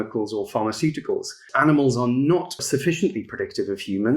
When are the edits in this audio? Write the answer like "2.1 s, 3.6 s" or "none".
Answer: 1.5 s, 2.6 s